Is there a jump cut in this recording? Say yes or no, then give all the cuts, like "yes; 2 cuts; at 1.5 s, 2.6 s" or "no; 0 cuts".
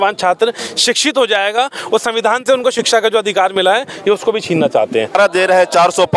yes; 1 cut; at 5.2 s